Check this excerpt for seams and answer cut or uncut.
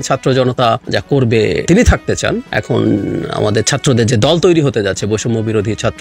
cut